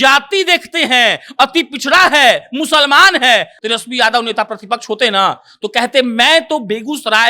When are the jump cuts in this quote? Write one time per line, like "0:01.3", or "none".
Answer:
0:03.5